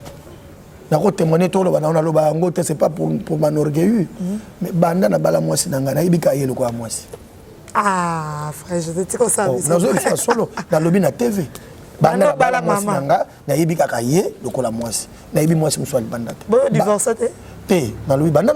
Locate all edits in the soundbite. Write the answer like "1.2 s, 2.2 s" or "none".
none